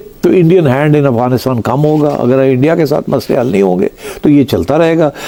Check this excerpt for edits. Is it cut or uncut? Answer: uncut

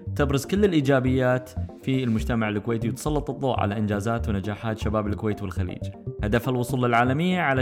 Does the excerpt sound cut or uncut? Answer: uncut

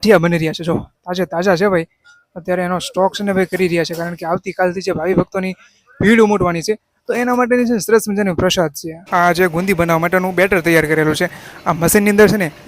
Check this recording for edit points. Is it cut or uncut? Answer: cut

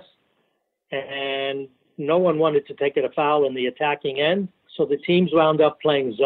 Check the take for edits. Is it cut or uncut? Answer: cut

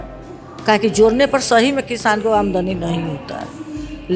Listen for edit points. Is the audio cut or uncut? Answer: uncut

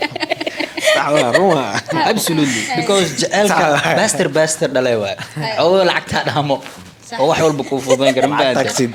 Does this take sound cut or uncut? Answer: uncut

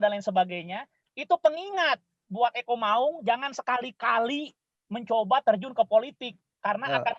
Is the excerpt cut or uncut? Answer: uncut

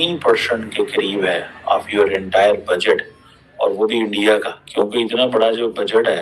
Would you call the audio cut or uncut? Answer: cut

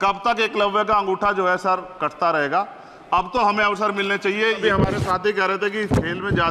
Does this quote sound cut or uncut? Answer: cut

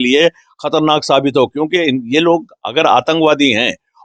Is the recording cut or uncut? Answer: uncut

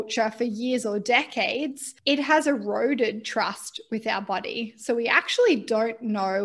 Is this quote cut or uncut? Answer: cut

